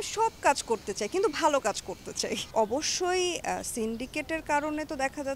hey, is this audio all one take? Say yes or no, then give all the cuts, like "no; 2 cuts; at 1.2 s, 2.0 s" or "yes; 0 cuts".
no; 1 cut; at 2.5 s